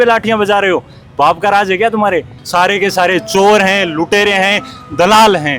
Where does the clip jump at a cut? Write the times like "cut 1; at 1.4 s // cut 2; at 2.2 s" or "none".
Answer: cut 1; at 2.4 s